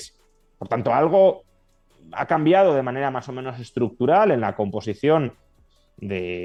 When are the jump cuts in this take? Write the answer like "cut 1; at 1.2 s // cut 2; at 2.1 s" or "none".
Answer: none